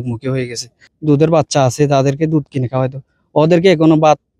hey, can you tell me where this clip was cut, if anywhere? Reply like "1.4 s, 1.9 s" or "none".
0.9 s